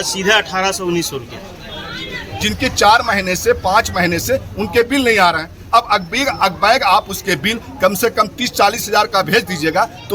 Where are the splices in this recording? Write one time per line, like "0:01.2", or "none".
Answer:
0:02.3